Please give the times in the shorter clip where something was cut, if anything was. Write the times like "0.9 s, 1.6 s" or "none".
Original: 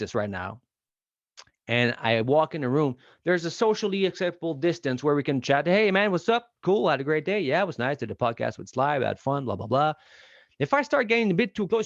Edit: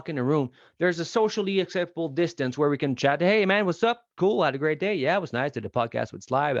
none

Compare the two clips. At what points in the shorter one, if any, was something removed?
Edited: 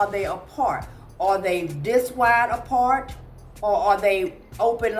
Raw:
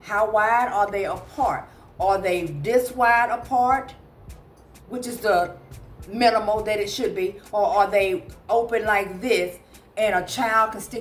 3.5 s

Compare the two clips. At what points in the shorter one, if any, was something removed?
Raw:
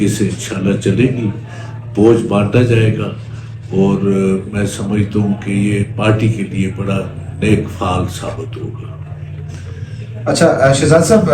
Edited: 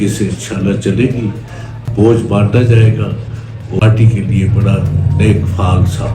3.8 s

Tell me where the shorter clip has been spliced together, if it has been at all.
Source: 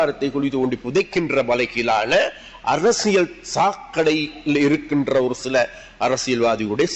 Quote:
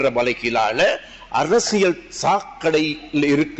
none

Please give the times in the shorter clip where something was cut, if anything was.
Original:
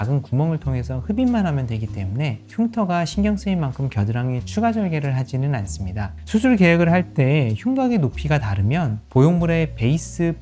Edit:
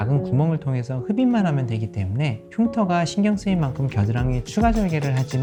none

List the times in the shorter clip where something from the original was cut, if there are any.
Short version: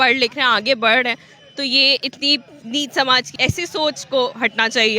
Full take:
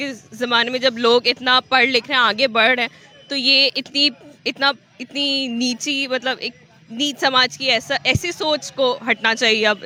2.5 s, 3.3 s

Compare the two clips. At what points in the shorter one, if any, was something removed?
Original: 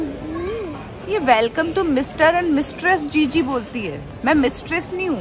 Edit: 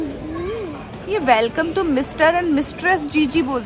none

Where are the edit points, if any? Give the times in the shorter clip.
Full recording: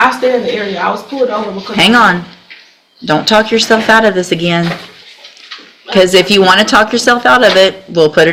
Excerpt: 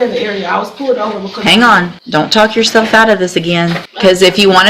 2.0 s, 3.9 s

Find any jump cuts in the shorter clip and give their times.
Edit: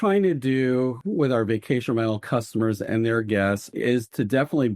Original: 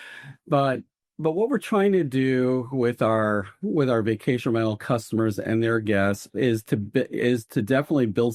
1.0 s, 3.7 s

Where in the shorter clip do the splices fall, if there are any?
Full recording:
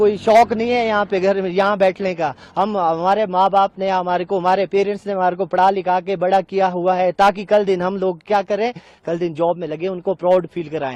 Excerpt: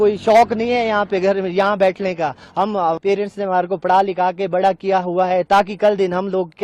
3.0 s

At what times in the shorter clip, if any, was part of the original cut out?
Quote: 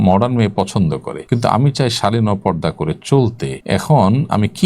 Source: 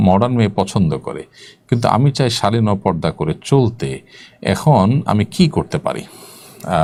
1.1 s, 3.5 s

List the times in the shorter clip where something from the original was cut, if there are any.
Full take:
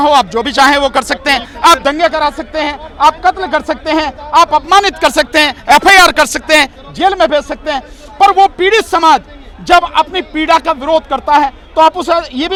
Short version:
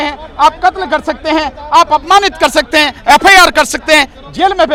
none

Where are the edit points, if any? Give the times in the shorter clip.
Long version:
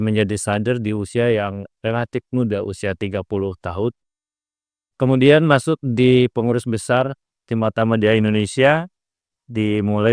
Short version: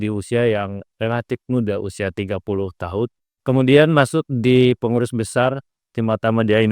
3.3 s

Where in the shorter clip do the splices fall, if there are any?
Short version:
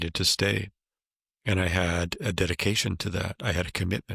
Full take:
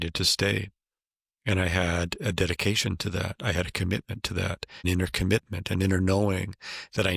none

